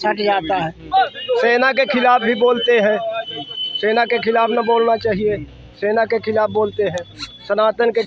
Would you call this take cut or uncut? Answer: cut